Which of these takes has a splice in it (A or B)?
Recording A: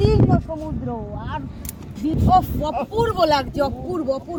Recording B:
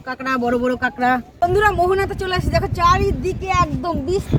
B